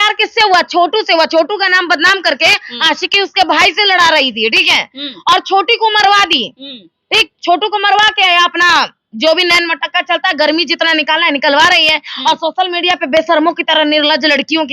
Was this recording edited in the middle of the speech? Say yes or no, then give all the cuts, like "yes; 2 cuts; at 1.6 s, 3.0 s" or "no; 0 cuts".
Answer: no; 0 cuts